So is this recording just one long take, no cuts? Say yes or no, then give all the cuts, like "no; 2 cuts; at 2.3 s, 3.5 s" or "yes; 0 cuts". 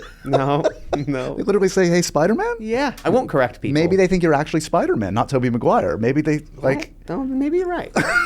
no; 1 cut; at 3.0 s